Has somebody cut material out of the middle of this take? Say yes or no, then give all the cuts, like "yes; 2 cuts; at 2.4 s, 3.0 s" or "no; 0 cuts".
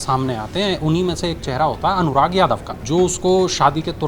yes; 1 cut; at 2.8 s